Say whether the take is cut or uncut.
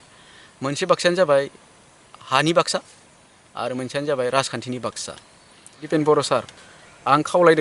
cut